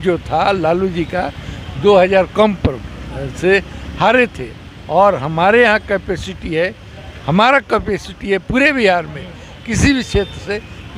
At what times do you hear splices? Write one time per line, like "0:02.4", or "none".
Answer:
none